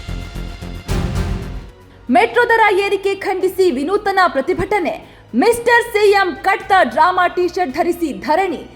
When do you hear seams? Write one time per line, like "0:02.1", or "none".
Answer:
0:01.6